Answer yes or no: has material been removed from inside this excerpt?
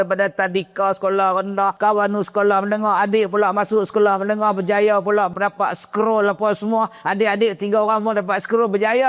yes